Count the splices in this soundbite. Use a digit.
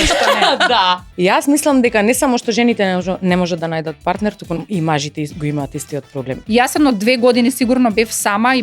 2